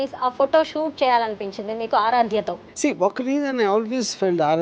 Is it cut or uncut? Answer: uncut